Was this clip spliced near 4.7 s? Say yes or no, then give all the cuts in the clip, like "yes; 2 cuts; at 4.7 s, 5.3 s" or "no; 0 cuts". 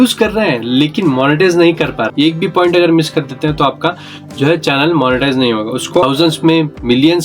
no; 2 cuts; at 2.1 s, 6.0 s